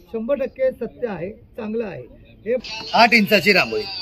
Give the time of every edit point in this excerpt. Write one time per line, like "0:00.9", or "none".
0:02.6